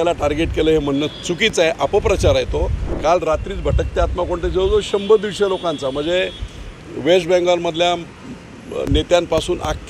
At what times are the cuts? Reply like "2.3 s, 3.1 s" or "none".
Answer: 2.9 s